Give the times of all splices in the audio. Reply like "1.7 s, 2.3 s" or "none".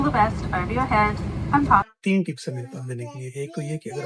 1.9 s